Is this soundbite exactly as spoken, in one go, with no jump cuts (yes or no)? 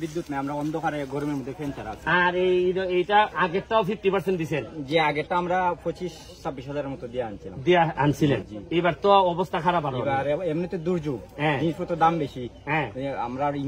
yes